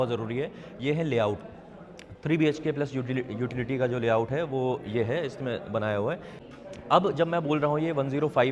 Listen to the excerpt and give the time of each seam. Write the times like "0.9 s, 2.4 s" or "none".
6.3 s